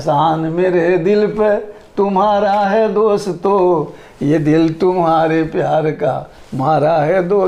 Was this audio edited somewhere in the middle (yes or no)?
no